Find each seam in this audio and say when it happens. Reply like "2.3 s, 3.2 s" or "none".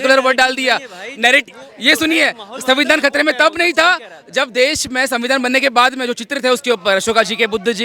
none

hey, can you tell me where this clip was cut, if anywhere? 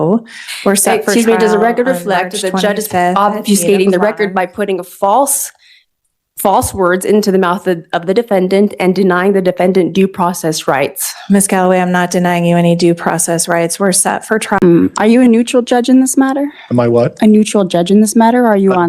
14.6 s

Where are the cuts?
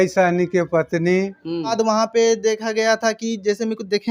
1.7 s

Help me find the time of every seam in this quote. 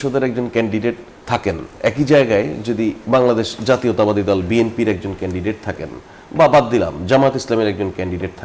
1.1 s

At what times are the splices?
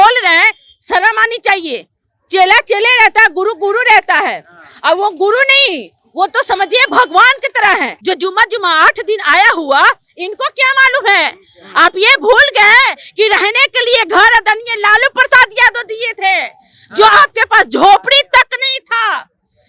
7.9 s

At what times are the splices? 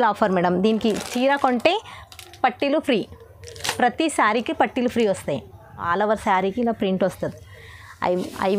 5.9 s

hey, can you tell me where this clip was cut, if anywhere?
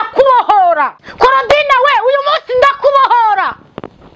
1.0 s

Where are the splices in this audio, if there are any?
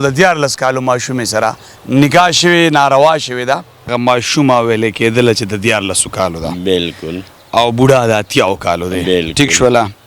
3.9 s

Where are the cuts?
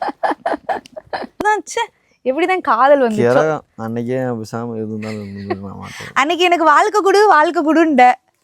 1.4 s

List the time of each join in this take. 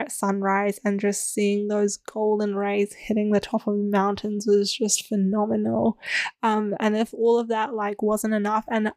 none

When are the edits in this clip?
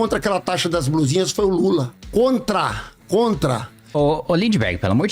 2.0 s, 3.8 s

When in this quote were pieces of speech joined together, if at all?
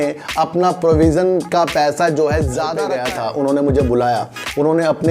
2.8 s

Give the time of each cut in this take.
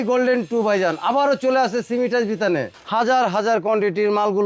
2.8 s

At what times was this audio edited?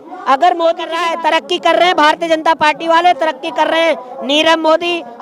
1.0 s

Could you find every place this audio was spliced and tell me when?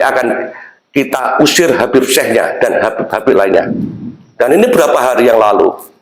none

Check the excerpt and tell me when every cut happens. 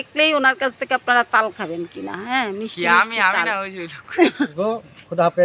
4.5 s

